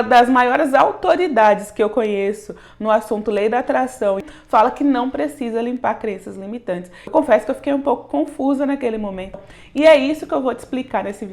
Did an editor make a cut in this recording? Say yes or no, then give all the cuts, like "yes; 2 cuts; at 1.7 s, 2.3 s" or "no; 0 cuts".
yes; 3 cuts; at 4.2 s, 7.1 s, 9.4 s